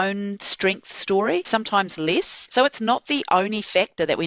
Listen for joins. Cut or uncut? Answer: cut